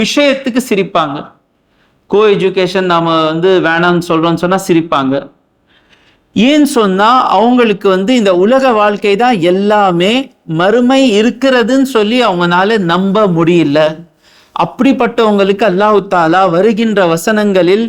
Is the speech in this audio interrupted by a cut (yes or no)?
no